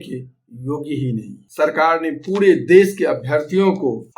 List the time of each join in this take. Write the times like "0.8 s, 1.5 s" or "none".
1.4 s